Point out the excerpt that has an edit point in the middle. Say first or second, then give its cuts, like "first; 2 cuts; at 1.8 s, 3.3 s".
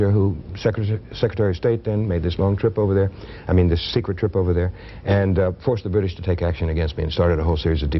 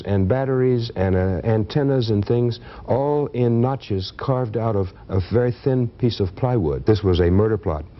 second; 1 cut; at 6.8 s